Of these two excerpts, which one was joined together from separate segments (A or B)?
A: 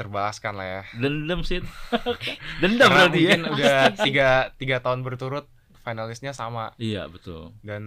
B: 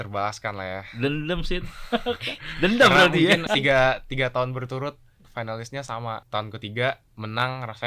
B